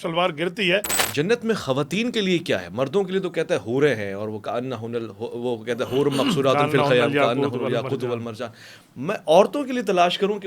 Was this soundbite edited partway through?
yes; 1 cut; at 1.0 s

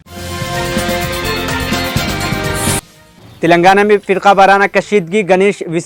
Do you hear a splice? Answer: no; 0 cuts

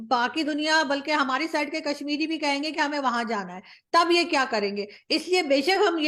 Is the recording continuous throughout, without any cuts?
yes; 0 cuts

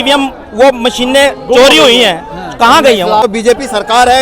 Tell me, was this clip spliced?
yes; 1 cut; at 3.2 s

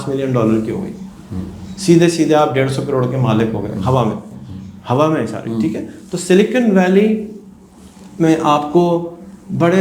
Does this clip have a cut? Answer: no; 0 cuts

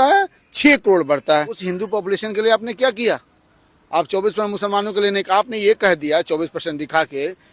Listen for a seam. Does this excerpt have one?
yes; 1 cut; at 1.6 s

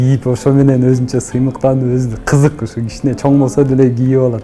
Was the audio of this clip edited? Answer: no; 0 cuts

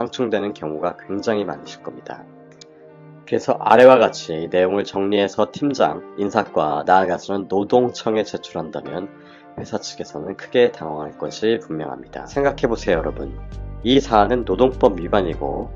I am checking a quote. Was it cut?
yes; 1 cut; at 12.1 s

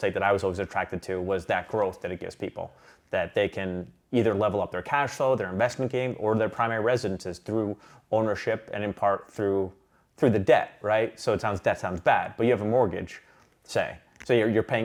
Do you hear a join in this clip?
no; 0 cuts

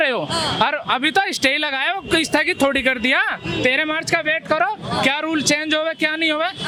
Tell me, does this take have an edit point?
no; 0 cuts

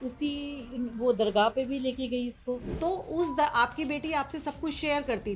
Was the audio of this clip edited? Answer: yes; 1 cut; at 2.7 s

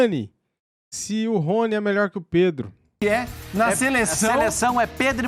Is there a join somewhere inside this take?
no; 0 cuts

